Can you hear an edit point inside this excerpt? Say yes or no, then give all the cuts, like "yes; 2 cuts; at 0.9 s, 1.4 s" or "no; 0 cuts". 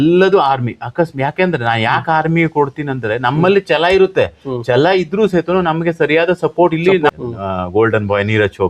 yes; 1 cut; at 7.1 s